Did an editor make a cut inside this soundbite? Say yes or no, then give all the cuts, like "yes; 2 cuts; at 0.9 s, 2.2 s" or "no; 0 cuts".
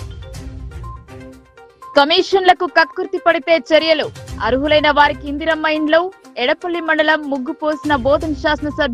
yes; 1 cut; at 1.9 s